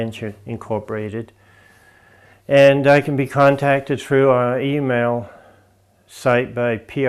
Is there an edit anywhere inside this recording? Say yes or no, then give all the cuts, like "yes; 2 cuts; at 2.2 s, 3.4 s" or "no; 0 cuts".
no; 0 cuts